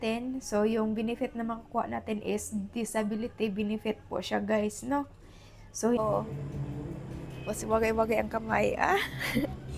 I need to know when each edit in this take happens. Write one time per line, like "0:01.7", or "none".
0:06.0

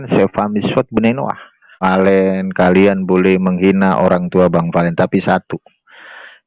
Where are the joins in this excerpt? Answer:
0:01.8

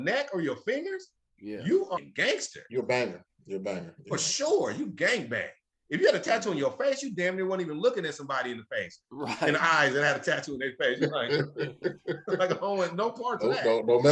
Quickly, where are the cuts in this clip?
0:02.0

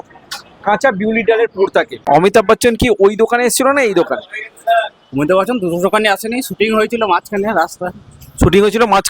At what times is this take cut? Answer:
0:02.0

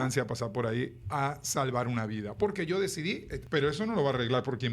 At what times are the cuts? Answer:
0:03.3

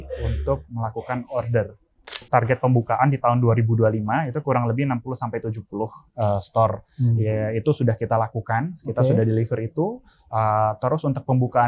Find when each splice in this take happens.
0:02.3

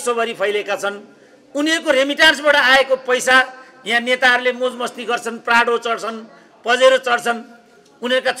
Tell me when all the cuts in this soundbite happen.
none

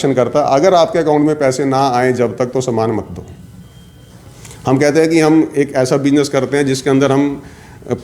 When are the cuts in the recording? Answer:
none

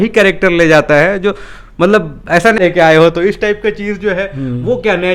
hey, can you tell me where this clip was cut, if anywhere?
0:02.6

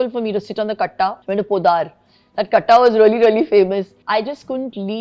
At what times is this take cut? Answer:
none

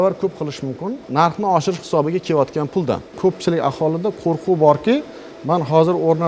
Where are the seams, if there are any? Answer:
0:01.0
0:03.1

